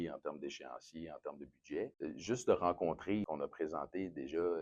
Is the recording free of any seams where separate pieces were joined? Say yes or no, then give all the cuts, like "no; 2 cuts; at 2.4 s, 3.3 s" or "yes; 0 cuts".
no; 2 cuts; at 1.9 s, 3.3 s